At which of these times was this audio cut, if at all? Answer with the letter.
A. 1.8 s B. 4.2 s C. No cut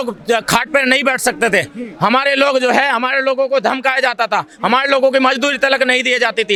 C